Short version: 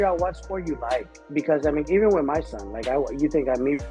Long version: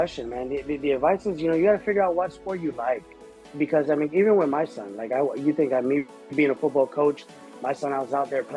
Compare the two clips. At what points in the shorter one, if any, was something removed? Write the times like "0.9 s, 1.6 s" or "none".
1.2 s